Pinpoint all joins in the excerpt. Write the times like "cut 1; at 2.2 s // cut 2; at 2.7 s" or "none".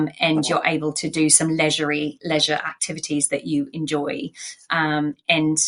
none